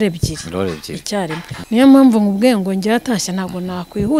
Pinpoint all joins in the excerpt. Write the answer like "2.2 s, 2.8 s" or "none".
1.5 s